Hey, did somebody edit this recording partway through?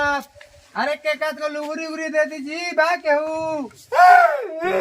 yes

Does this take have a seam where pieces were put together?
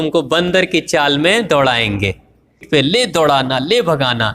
yes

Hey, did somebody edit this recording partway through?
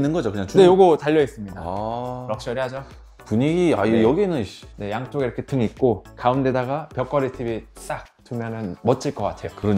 no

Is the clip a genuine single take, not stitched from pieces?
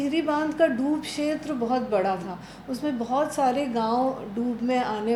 yes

